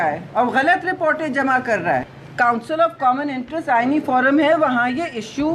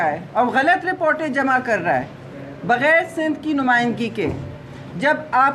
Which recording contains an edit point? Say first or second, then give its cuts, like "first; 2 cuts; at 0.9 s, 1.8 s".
first; 1 cut; at 2.2 s